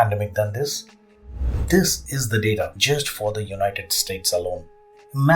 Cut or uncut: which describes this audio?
cut